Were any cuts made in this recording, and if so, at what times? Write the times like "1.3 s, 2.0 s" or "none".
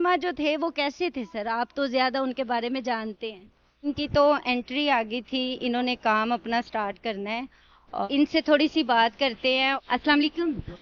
3.9 s, 8.1 s